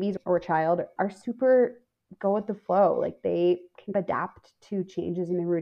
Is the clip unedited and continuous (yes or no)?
yes